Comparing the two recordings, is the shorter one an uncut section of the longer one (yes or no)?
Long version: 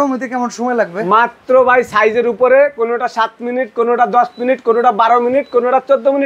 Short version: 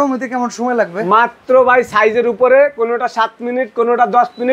yes